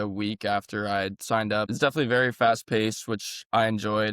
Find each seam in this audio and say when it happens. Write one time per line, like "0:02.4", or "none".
0:01.7